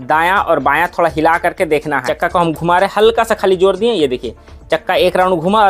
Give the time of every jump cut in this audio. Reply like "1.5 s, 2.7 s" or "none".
2.1 s